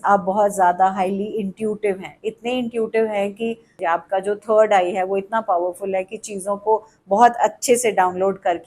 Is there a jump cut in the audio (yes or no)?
yes